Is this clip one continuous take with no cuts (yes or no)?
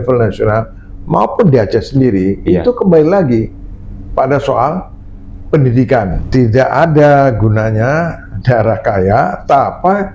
no